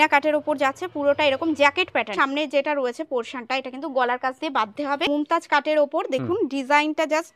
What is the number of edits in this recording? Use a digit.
2